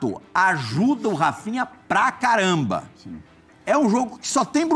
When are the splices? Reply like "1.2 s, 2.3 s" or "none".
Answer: none